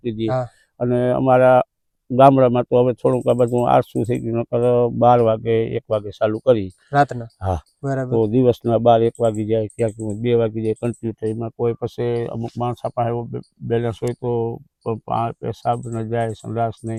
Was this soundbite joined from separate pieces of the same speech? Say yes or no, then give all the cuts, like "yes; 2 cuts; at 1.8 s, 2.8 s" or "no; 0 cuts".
no; 0 cuts